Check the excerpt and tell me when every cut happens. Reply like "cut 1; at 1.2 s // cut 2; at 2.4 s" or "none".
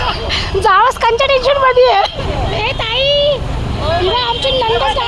cut 1; at 2.2 s